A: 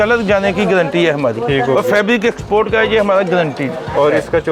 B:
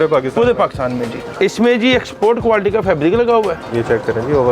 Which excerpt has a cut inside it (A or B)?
B